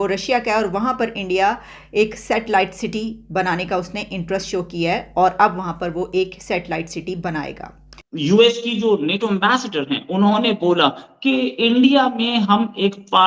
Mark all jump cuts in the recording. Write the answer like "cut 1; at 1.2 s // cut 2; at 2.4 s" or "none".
cut 1; at 8.0 s